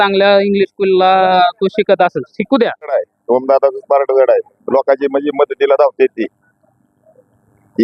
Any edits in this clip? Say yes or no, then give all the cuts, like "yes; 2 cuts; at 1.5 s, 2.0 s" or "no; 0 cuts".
yes; 1 cut; at 2.9 s